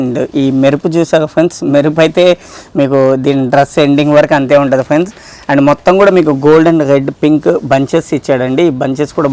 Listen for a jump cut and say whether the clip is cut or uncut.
uncut